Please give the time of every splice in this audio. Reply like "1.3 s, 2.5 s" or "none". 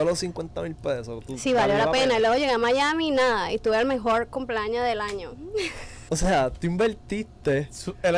6.1 s